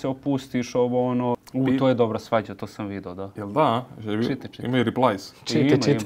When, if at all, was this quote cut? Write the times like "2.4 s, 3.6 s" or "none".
1.4 s